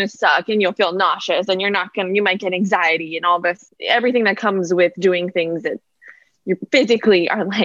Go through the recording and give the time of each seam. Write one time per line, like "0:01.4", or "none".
0:03.7